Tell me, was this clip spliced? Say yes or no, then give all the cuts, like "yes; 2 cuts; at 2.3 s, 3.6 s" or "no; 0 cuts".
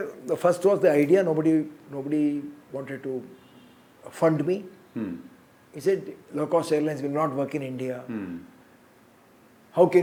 no; 0 cuts